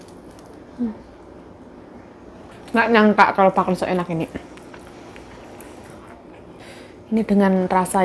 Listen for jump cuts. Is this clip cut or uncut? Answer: cut